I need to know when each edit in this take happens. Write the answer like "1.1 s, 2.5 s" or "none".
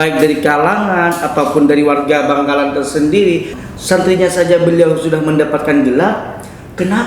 3.6 s